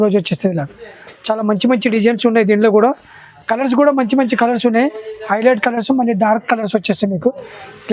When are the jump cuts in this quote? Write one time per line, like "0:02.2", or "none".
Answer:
none